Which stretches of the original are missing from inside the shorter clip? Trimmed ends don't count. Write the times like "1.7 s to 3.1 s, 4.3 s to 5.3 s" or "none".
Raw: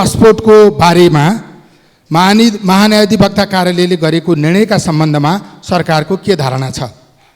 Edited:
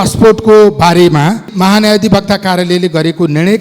1.5 s to 2.6 s